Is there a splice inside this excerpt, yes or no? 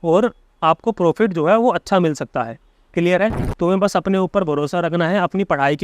yes